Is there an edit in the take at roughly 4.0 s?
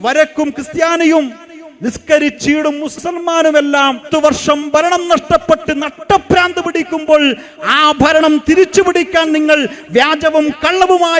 yes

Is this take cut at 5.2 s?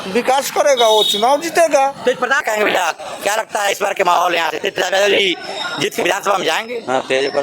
no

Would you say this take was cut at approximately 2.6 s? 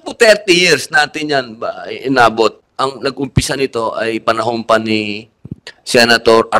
yes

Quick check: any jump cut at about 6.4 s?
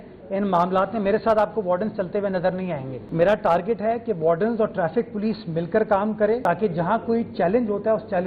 yes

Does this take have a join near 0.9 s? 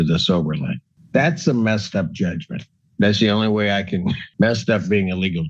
yes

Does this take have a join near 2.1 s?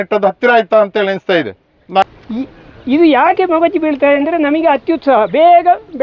yes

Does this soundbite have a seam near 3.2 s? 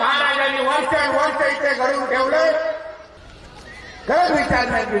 yes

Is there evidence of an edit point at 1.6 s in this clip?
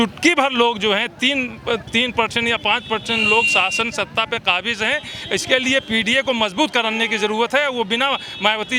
no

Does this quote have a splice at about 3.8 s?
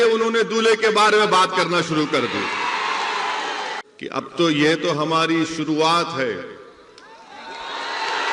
yes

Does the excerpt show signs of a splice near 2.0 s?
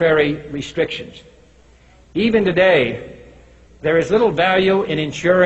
no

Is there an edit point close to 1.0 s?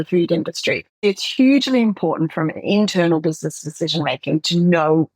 yes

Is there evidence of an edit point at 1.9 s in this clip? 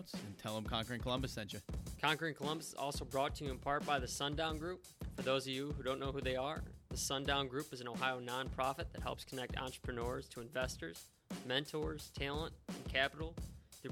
yes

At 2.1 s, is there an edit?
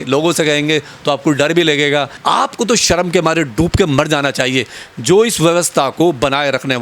yes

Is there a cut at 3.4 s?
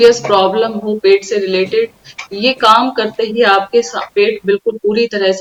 no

